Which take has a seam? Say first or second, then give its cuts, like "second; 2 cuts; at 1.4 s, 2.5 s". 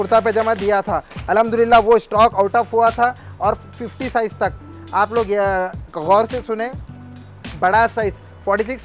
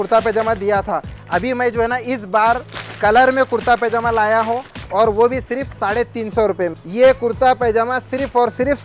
second; 2 cuts; at 1.1 s, 6.7 s